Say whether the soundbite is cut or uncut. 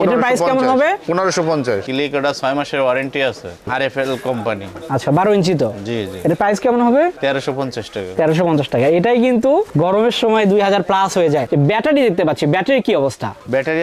cut